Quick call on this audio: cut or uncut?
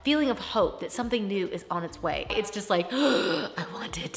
cut